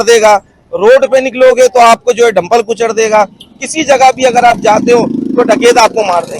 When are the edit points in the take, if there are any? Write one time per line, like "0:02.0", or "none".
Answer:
0:03.4